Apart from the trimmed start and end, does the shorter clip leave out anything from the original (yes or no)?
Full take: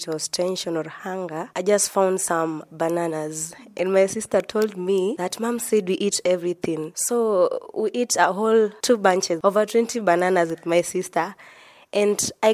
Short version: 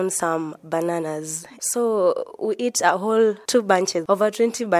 yes